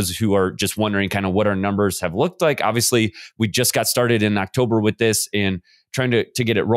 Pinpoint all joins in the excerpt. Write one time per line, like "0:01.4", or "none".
none

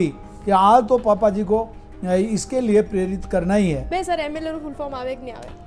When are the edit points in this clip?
0:03.9

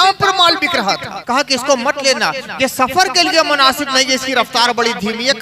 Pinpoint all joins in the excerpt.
0:01.1

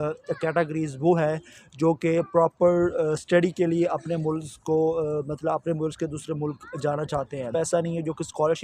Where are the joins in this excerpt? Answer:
0:07.5

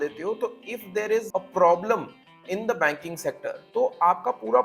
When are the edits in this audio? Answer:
0:01.3
0:03.5

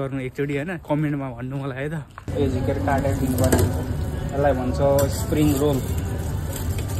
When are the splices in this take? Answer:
0:02.3

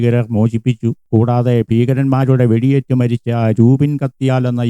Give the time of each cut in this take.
0:01.0

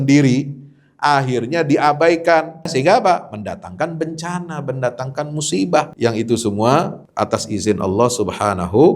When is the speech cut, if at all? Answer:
0:02.7
0:05.9
0:07.0

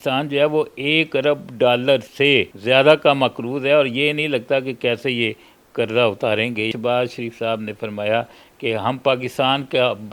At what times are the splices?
0:02.3
0:06.7

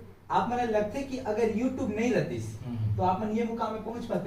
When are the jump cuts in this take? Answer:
none

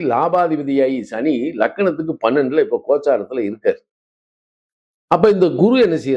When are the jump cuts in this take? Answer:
none

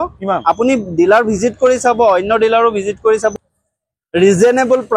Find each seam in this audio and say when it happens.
0:03.3

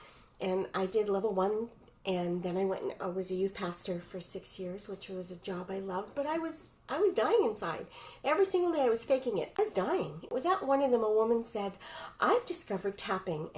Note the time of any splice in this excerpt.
0:09.8

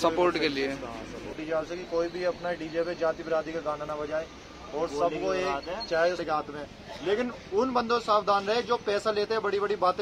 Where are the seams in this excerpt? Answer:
0:01.3
0:06.2

